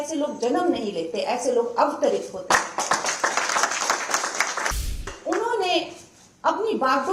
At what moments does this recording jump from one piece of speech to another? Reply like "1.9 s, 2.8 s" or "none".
5.1 s